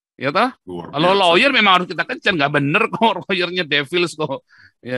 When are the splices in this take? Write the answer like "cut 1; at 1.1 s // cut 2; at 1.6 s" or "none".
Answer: none

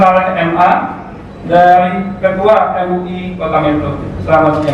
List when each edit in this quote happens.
none

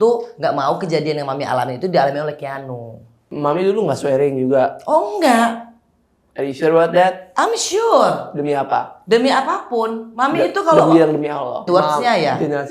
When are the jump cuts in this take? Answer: cut 1; at 3.2 s // cut 2; at 11.7 s

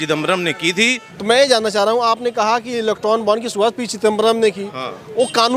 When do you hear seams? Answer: cut 1; at 1.1 s

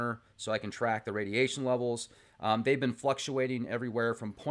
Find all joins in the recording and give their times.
cut 1; at 1.0 s

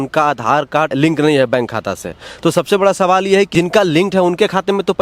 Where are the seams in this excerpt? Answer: cut 1; at 0.9 s // cut 2; at 3.5 s

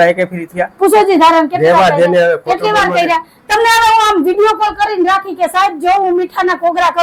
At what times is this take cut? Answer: none

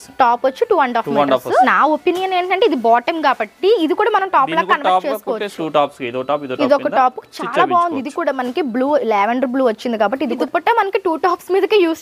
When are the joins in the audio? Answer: cut 1; at 1.7 s // cut 2; at 5.5 s // cut 3; at 10.4 s

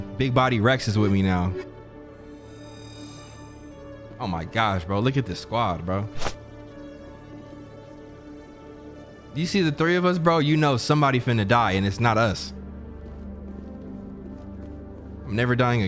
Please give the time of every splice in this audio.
none

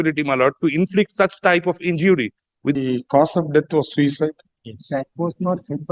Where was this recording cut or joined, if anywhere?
cut 1; at 2.8 s

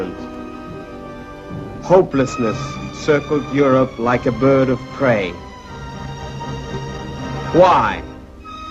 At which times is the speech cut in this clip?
cut 1; at 7.3 s

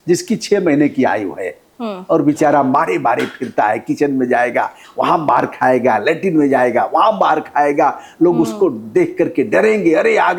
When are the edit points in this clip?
none

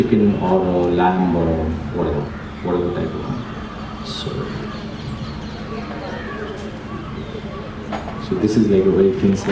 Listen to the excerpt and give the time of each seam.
none

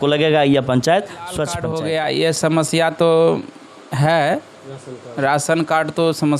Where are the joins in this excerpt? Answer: cut 1; at 1.6 s

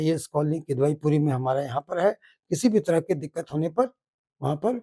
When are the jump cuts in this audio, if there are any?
none

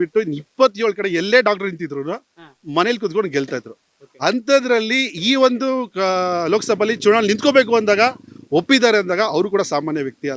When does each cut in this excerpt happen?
none

